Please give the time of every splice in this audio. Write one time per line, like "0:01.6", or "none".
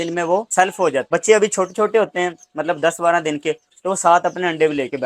0:01.0